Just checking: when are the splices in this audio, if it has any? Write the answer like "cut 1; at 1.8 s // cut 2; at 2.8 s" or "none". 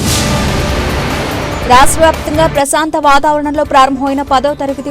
cut 1; at 1.3 s